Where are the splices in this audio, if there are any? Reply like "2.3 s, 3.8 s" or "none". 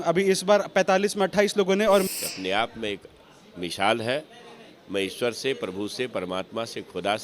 2.1 s